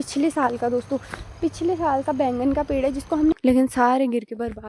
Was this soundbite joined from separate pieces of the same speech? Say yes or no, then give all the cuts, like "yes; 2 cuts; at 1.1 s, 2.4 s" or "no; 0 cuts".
yes; 1 cut; at 3.3 s